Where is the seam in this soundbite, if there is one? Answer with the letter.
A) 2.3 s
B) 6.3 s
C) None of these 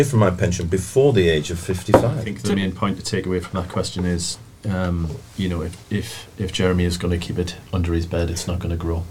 A